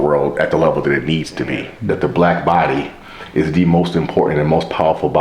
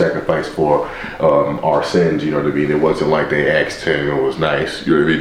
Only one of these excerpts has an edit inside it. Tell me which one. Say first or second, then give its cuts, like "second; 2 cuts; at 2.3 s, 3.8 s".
first; 1 cut; at 1.7 s